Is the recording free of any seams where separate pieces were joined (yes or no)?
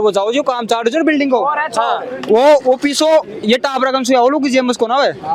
yes